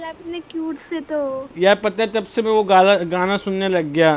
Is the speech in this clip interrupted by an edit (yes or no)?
no